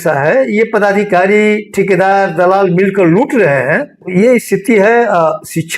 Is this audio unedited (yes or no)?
no